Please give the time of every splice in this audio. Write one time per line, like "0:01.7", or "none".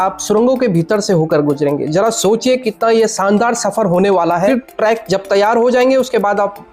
0:04.5